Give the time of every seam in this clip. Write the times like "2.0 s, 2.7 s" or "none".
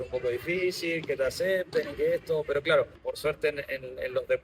3.0 s